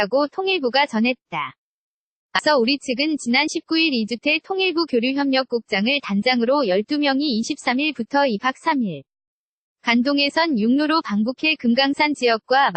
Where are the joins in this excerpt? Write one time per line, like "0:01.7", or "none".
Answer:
0:02.4